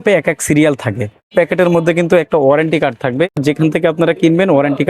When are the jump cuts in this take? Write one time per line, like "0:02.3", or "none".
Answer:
0:01.3
0:03.3